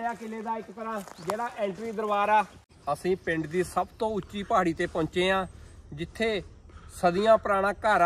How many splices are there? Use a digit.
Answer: 1